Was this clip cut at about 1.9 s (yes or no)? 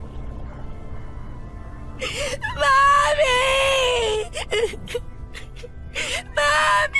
yes